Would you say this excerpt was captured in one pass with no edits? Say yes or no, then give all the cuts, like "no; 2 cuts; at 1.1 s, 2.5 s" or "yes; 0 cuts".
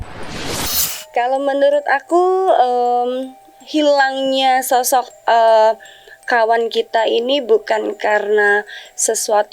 no; 1 cut; at 0.9 s